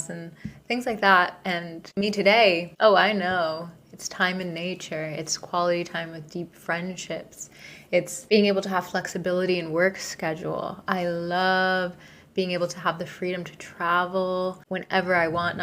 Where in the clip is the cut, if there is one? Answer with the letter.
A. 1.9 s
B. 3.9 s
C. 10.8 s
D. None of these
A